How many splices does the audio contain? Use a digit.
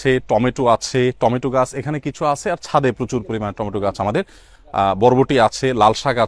0